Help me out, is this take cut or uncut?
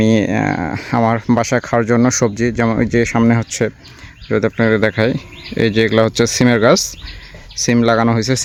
uncut